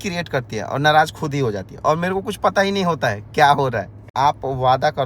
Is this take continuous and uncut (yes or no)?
no